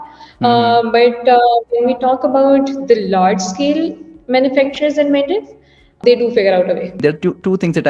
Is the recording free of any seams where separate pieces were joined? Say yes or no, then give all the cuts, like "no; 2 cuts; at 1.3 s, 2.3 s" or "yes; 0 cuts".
no; 2 cuts; at 6.0 s, 7.0 s